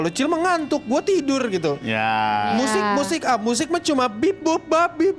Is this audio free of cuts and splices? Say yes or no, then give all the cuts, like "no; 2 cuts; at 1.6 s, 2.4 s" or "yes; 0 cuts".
yes; 0 cuts